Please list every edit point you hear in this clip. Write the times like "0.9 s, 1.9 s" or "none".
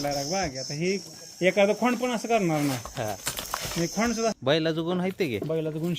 4.4 s